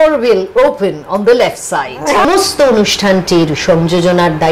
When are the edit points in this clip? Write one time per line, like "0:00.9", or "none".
0:02.3